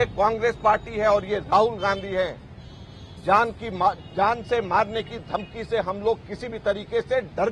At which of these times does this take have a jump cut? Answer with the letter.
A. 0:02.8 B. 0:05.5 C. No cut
C